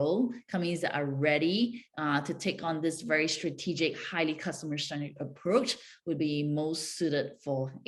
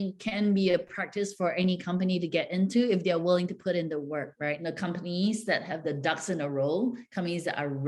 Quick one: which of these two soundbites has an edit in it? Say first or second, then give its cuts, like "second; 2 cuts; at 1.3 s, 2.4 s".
second; 1 cut; at 4.6 s